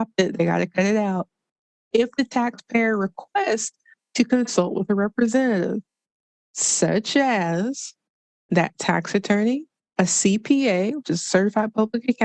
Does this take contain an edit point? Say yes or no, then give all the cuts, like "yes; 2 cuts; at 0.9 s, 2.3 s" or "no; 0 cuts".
yes; 1 cut; at 9.8 s